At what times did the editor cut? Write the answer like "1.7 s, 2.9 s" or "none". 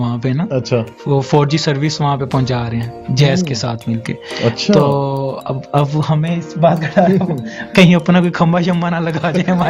none